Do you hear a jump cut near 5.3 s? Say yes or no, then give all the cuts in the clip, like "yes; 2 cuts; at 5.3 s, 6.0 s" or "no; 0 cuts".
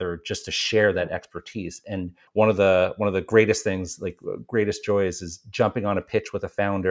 no; 1 cut; at 2.2 s